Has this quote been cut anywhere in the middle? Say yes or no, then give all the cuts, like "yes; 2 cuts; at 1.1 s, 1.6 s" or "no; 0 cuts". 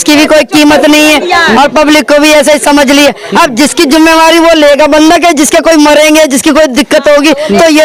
no; 0 cuts